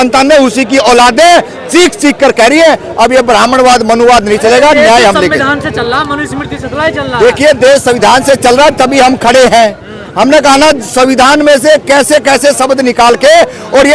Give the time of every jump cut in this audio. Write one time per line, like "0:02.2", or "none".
none